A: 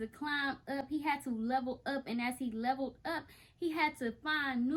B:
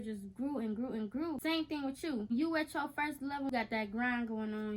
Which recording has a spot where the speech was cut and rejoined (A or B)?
B